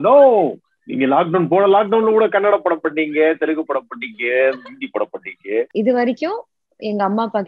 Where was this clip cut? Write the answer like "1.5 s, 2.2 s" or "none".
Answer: 5.7 s